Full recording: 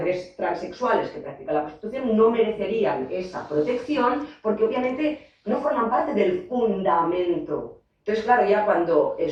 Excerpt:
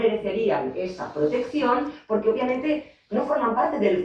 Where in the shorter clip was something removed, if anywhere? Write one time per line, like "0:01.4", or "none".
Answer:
none